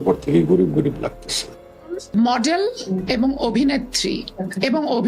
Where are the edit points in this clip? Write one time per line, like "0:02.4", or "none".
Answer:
0:02.0